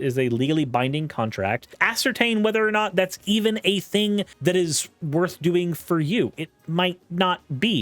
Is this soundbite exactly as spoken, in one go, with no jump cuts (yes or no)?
no